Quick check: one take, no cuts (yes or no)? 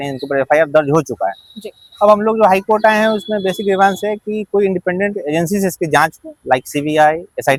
yes